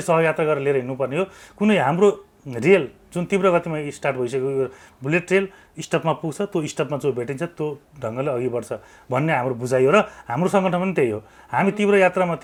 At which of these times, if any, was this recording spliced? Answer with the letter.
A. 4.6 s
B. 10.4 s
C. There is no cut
C